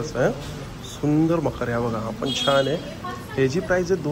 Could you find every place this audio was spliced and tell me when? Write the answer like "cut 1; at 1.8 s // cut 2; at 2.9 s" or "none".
none